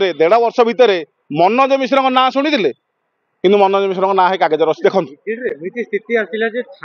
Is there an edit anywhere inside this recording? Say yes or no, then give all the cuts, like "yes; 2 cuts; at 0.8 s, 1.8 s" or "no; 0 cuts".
no; 0 cuts